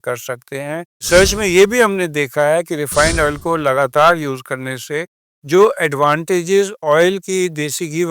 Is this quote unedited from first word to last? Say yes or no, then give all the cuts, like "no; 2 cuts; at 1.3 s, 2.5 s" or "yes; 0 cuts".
no; 1 cut; at 1.1 s